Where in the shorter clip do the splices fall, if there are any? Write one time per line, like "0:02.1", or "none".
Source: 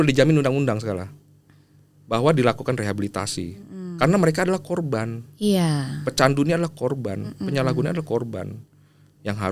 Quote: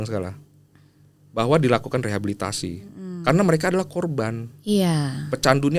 none